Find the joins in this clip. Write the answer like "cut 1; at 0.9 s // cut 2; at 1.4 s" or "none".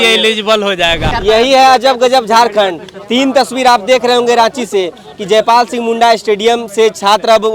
cut 1; at 1.1 s

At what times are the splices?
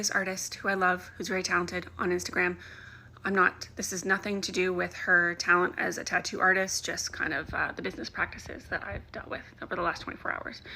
cut 1; at 2.6 s

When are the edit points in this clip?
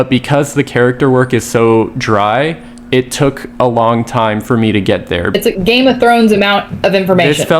cut 1; at 5.3 s

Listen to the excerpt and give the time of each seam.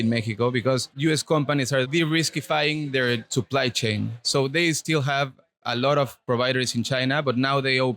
cut 1; at 0.9 s // cut 2; at 1.9 s

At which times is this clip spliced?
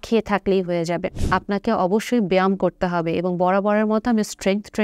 cut 1; at 1.2 s

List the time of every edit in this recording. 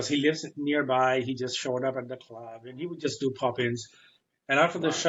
none

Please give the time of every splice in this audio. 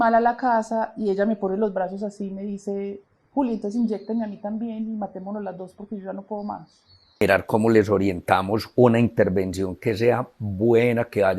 cut 1; at 7.2 s

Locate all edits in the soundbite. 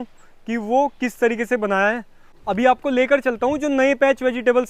cut 1; at 2.2 s

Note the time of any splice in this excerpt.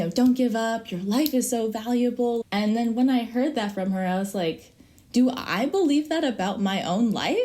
cut 1; at 2.4 s

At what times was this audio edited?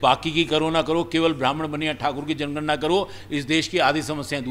none

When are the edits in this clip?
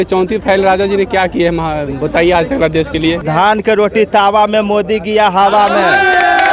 cut 1; at 3.3 s

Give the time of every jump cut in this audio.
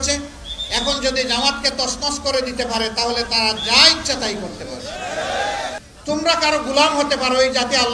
cut 1; at 5.9 s

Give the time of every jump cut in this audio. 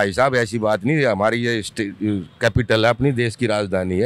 none

